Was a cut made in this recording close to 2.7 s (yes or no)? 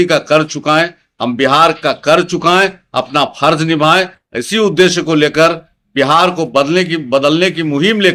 no